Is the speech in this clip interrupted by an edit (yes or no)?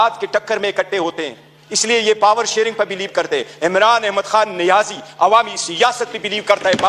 no